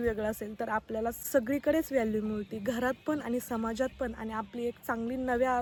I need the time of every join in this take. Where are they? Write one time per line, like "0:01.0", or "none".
none